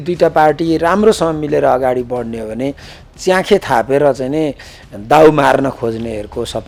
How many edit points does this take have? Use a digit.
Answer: 0